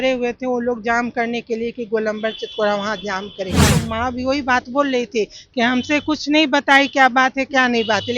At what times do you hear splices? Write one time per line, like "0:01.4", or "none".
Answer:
0:03.7